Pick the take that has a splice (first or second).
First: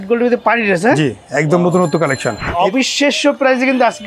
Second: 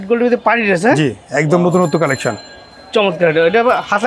first